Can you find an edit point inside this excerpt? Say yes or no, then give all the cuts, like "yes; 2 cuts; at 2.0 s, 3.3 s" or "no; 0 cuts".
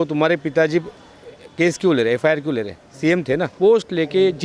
yes; 1 cut; at 3.5 s